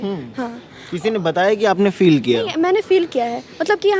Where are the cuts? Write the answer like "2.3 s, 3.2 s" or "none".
none